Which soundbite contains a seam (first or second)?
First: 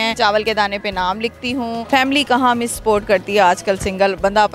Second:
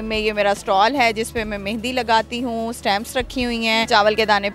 first